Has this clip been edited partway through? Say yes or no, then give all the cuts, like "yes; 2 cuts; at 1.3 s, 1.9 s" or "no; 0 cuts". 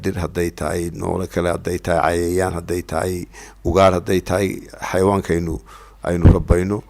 no; 0 cuts